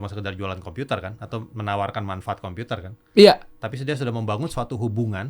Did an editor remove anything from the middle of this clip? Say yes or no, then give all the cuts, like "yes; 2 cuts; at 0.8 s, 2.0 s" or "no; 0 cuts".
yes; 1 cut; at 1.5 s